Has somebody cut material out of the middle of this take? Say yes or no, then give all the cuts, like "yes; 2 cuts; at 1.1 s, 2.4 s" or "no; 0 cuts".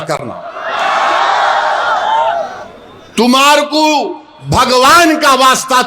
no; 0 cuts